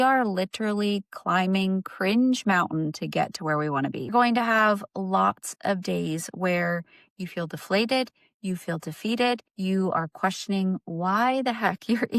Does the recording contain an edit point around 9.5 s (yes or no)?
yes